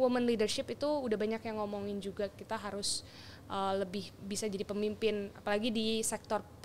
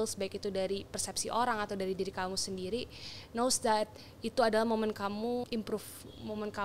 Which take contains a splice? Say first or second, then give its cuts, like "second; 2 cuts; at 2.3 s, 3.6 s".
second; 1 cut; at 5.5 s